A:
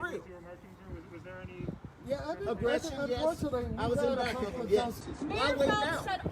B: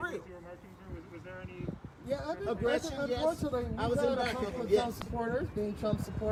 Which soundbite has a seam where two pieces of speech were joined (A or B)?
A